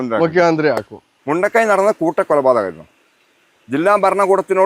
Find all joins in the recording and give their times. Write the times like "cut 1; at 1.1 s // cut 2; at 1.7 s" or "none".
cut 1; at 1.3 s